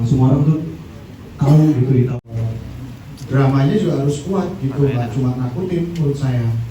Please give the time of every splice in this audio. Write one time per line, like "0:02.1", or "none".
0:02.1